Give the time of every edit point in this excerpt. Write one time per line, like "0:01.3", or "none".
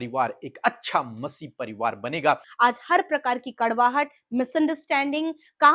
0:02.5